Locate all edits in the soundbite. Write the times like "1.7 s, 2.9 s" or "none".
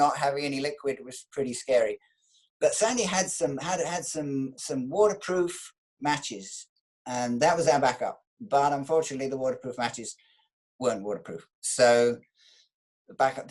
none